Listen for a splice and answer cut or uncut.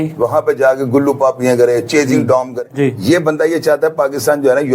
cut